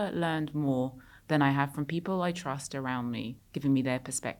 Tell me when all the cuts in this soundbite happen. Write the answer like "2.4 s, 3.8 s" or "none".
3.4 s